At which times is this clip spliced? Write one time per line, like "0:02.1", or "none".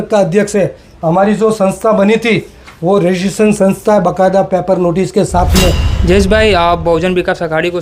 0:05.9